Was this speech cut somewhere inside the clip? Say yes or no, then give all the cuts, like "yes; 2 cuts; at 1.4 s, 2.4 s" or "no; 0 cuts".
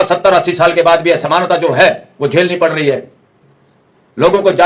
no; 0 cuts